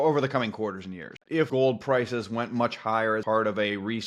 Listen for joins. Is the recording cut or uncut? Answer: cut